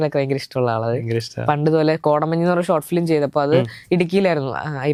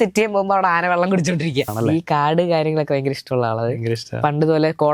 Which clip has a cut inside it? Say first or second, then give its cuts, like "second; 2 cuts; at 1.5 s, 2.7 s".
second; 1 cut; at 1.7 s